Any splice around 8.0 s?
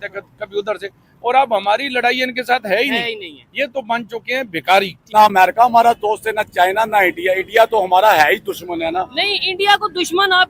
no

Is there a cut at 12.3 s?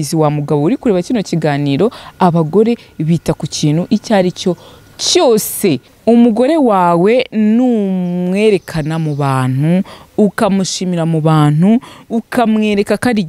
no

